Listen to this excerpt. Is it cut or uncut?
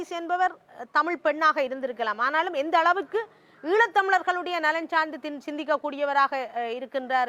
uncut